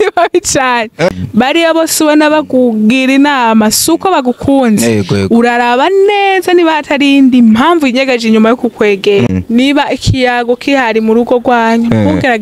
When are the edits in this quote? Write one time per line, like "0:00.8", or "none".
0:01.1
0:09.3